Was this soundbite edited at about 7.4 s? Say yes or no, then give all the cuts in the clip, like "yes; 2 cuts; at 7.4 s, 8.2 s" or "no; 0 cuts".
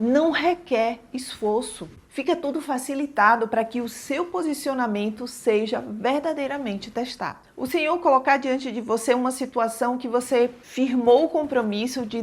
yes; 1 cut; at 7.4 s